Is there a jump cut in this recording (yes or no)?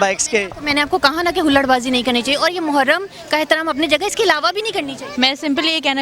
yes